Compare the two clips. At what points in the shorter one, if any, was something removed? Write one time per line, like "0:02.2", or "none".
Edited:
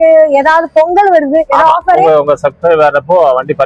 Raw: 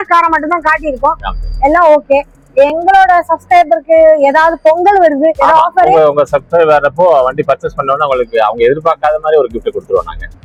none